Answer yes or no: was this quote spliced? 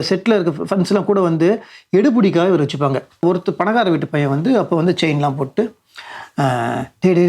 yes